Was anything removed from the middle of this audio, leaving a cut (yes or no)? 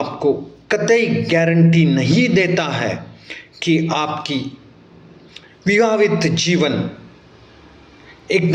no